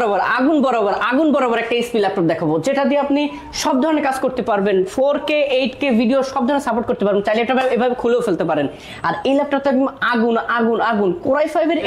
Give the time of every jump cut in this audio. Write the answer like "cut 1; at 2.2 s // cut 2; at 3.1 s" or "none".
none